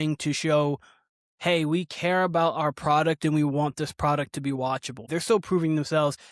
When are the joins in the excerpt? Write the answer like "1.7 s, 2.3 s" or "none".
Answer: 5.0 s